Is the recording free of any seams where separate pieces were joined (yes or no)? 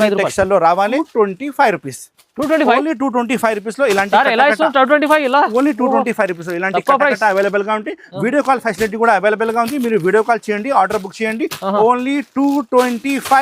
no